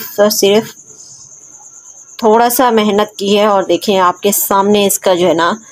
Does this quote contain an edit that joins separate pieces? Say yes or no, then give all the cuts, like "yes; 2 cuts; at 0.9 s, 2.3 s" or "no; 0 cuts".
no; 0 cuts